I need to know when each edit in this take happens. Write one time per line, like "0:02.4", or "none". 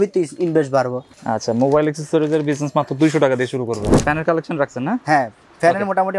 0:01.1
0:04.0